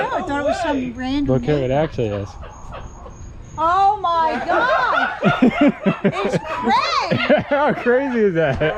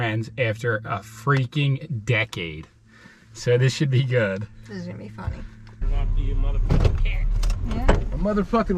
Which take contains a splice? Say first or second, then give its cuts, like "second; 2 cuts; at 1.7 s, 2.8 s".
second; 2 cuts; at 3.0 s, 5.9 s